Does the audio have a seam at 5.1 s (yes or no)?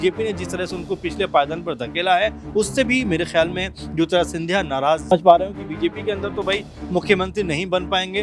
yes